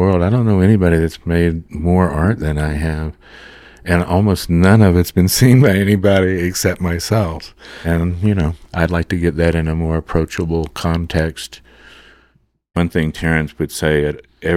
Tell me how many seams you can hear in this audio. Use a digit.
1